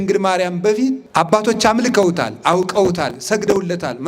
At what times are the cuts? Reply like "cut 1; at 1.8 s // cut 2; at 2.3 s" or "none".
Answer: cut 1; at 1.0 s